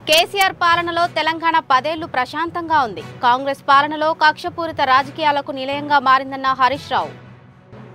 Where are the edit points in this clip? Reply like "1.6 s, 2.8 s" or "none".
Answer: none